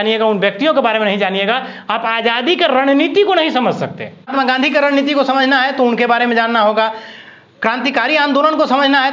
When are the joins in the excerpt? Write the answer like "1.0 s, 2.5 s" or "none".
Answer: 4.3 s